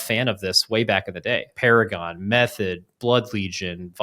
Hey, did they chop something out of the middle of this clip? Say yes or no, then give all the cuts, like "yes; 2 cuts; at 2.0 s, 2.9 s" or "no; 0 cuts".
yes; 1 cut; at 1.5 s